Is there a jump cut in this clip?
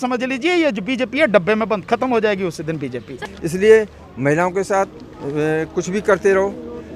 yes; 1 cut; at 3.1 s

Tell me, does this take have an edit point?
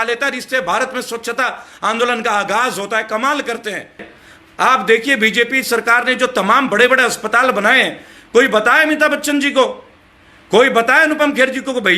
yes; 1 cut; at 4.1 s

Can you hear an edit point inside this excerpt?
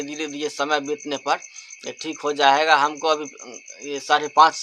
no; 0 cuts

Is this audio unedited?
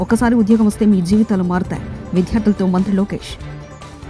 yes; 0 cuts

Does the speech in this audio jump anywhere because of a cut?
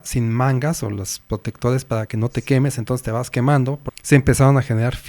yes; 1 cut; at 3.9 s

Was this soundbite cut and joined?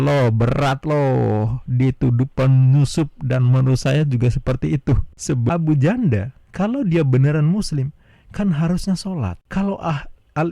yes; 1 cut; at 5.4 s

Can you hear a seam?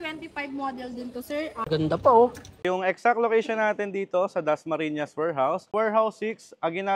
yes; 3 cuts; at 1.7 s, 2.5 s, 5.7 s

